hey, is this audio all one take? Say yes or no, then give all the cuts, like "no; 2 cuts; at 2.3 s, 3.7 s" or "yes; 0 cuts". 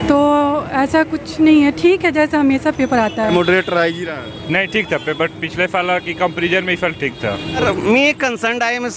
no; 2 cuts; at 3.3 s, 7.6 s